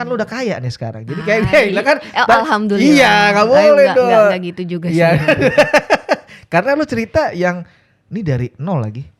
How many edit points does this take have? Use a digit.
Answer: 0